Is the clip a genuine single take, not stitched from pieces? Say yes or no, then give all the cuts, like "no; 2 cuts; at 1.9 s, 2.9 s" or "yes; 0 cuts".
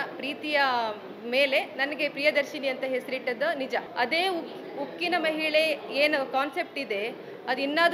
no; 1 cut; at 3.9 s